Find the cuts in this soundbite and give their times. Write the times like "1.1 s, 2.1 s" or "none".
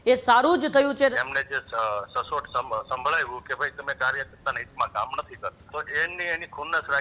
1.1 s, 5.6 s